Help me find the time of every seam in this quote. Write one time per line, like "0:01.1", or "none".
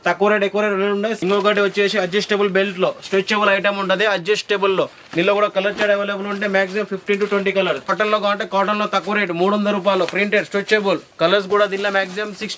0:01.2
0:07.9